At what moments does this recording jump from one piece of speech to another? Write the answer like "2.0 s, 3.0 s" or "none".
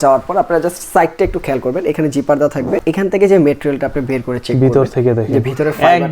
2.8 s